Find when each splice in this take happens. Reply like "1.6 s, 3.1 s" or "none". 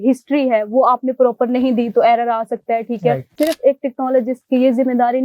3.3 s